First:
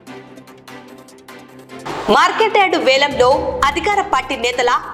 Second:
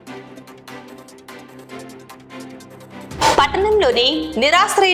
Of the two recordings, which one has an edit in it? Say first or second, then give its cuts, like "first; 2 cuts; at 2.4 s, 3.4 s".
second; 1 cut; at 1.8 s